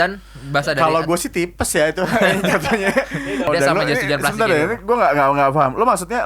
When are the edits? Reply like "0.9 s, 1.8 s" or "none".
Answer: 3.5 s